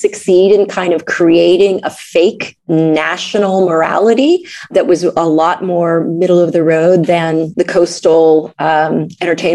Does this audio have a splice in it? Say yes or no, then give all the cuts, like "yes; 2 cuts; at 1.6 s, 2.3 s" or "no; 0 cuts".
yes; 3 cuts; at 2.5 s, 4.7 s, 7.5 s